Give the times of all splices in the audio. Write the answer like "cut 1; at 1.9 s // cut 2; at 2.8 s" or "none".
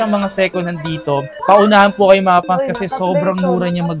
none